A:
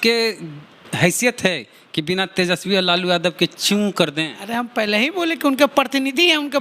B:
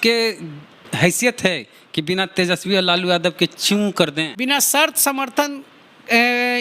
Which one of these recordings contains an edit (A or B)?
B